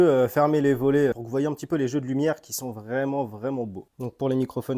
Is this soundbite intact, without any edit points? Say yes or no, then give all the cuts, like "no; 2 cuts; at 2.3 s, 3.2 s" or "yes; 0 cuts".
no; 2 cuts; at 1.1 s, 3.9 s